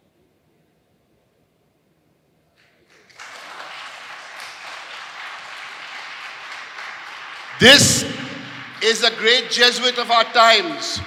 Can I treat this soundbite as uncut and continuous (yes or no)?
yes